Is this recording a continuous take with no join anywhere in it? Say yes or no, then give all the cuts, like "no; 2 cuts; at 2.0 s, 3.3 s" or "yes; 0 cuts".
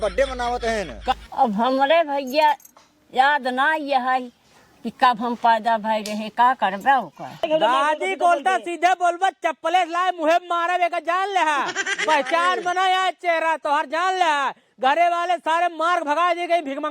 no; 2 cuts; at 1.1 s, 7.4 s